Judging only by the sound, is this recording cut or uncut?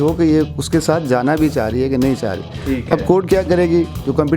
uncut